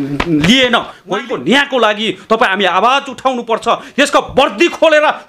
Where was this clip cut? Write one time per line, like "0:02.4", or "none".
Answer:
0:01.0